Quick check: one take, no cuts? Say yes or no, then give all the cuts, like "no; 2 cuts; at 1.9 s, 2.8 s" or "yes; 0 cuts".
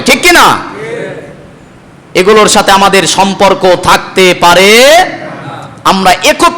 yes; 0 cuts